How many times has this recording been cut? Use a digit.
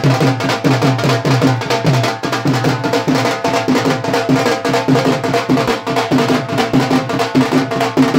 0